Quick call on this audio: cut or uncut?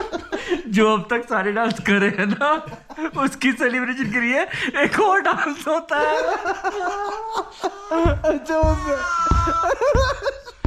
uncut